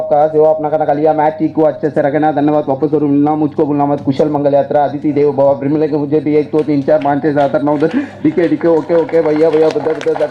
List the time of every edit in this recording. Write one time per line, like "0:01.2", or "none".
none

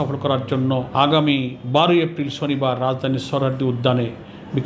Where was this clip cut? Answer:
0:00.9
0:01.6

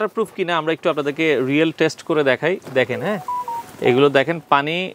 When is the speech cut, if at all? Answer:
none

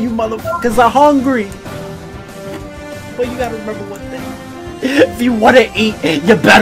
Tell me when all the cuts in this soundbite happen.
0:01.5
0:03.1

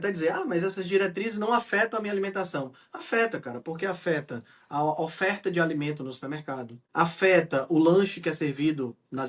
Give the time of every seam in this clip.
0:06.8

